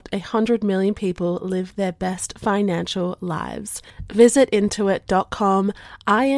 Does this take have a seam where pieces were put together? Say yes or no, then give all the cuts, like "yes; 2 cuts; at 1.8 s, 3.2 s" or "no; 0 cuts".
no; 0 cuts